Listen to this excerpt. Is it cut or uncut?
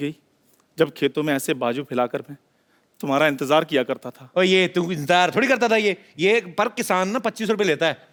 uncut